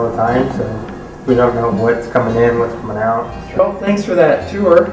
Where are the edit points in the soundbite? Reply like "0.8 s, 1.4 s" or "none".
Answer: 3.6 s

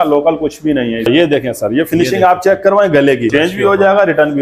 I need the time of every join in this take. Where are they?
1.1 s, 3.3 s

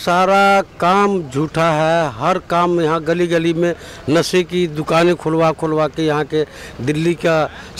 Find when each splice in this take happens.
none

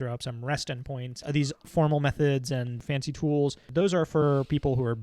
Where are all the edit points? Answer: 1.1 s

